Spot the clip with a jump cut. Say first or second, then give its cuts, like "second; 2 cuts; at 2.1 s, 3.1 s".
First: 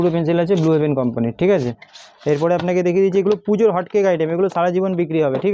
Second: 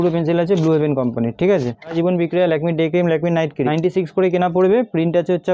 second; 2 cuts; at 1.9 s, 3.7 s